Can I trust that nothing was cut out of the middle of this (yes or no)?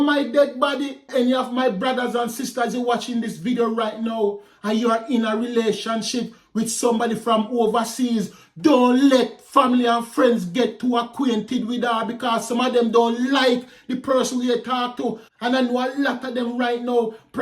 no